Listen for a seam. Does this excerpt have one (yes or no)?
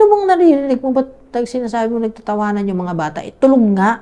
no